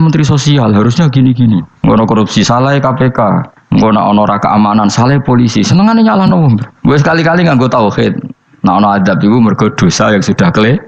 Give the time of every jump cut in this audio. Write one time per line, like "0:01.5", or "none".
0:01.7
0:03.5